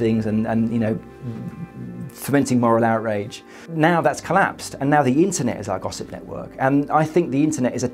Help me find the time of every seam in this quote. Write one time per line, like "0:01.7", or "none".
0:03.6